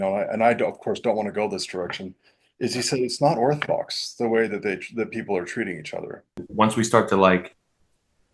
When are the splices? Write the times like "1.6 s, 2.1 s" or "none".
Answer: 6.4 s